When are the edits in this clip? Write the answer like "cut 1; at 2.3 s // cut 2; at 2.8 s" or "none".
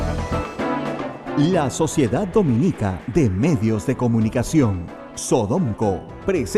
cut 1; at 1.2 s